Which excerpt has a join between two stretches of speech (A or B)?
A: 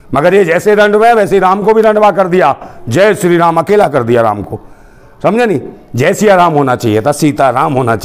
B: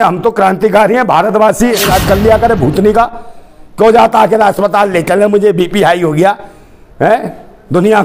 B